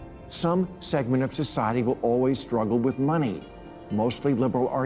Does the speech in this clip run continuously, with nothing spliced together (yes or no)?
yes